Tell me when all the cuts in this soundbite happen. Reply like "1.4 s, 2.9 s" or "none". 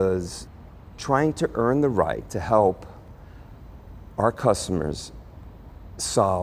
none

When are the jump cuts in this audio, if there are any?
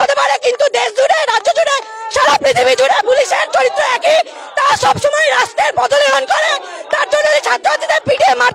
none

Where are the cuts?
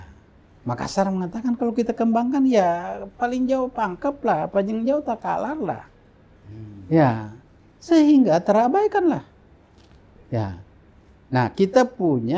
none

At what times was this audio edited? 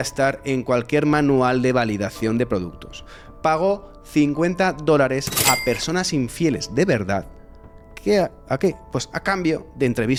none

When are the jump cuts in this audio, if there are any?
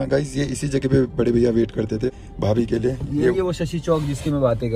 2.1 s

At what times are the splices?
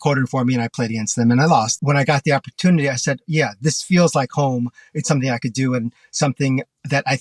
1.8 s

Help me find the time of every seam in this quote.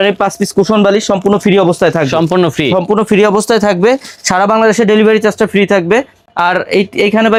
none

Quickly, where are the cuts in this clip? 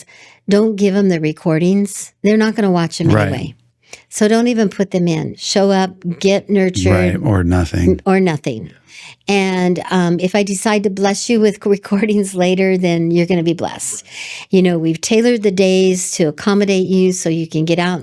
2.1 s, 5.4 s, 13.9 s

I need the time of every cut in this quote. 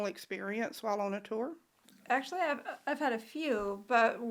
none

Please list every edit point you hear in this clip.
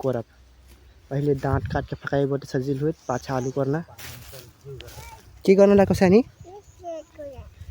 5.3 s

